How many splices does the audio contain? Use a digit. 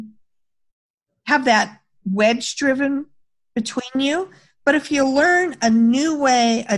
0